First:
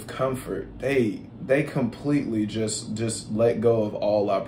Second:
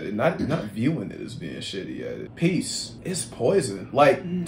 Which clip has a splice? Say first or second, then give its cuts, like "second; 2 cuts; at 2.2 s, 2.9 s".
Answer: second; 2 cuts; at 2.3 s, 2.9 s